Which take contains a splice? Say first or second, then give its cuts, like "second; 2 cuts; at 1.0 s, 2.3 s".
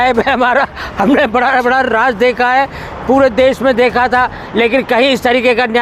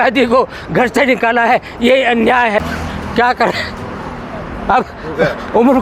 second; 1 cut; at 2.6 s